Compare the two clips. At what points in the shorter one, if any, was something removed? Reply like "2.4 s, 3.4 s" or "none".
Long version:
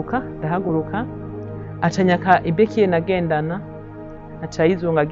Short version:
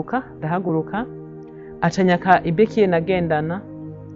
none